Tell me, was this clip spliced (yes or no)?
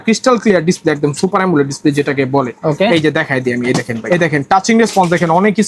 yes